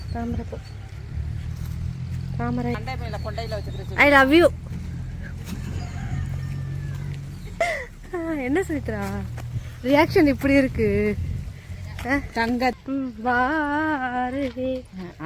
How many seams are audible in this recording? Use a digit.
3